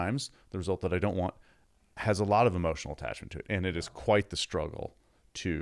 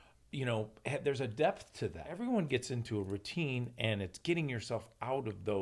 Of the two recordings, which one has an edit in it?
second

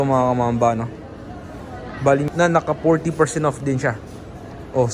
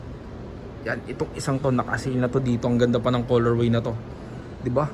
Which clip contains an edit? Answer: first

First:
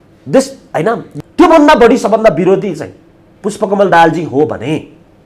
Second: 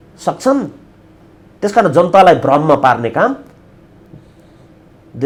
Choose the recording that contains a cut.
first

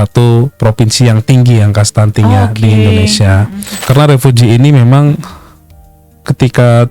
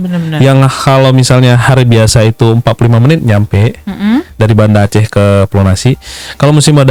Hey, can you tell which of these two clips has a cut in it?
first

